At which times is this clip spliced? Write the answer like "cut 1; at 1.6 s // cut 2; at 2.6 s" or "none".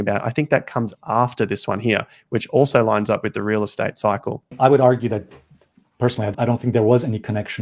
cut 1; at 4.5 s // cut 2; at 6.3 s